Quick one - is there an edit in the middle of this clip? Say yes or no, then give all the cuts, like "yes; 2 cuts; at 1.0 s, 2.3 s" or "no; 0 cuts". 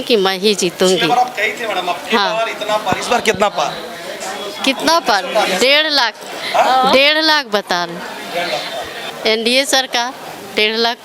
no; 0 cuts